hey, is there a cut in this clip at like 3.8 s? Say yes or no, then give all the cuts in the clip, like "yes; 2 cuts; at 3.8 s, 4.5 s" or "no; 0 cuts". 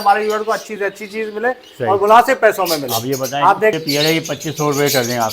yes; 1 cut; at 3.8 s